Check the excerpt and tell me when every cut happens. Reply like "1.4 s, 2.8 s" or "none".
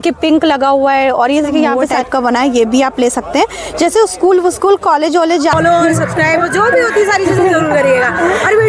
1.9 s, 5.5 s